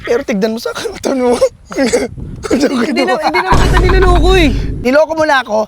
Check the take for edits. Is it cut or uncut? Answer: cut